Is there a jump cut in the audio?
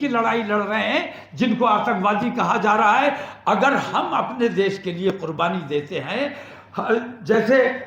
no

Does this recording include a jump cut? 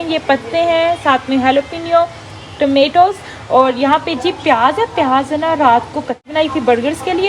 yes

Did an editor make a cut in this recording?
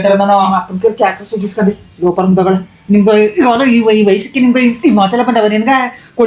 no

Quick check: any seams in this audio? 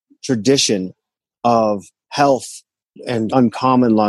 no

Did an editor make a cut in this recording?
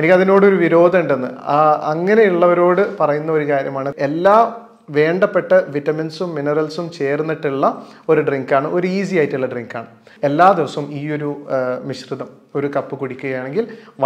yes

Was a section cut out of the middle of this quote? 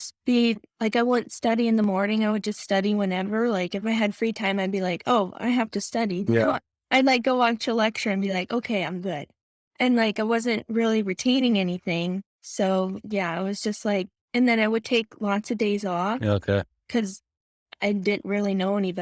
no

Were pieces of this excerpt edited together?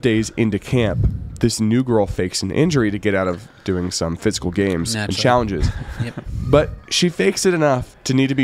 no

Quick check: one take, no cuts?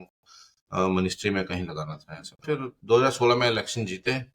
no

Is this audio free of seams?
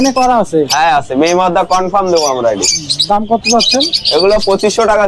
yes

